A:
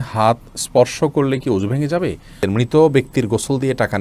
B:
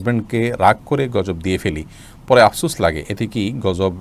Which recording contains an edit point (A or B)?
A